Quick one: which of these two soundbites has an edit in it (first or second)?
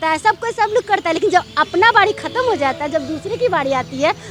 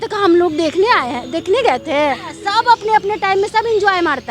second